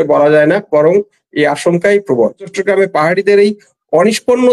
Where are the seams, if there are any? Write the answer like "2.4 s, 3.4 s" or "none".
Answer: 2.6 s